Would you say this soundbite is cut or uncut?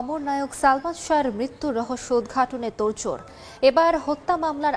uncut